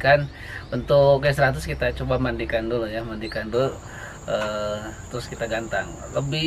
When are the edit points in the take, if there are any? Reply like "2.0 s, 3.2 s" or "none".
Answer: none